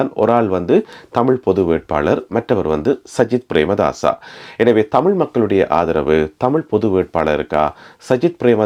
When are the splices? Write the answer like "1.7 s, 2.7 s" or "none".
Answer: none